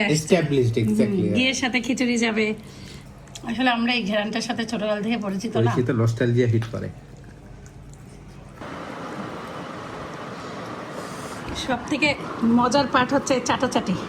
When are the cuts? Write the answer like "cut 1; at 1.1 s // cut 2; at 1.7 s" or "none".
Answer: none